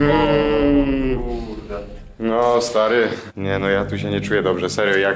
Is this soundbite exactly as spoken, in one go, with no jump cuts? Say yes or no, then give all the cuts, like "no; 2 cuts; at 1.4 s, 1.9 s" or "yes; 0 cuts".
no; 1 cut; at 3.3 s